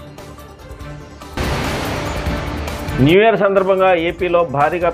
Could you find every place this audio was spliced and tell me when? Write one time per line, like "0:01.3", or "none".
none